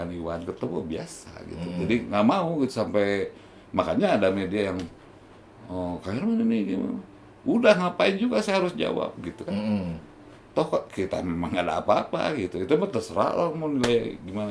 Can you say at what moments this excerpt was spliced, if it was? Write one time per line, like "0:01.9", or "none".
none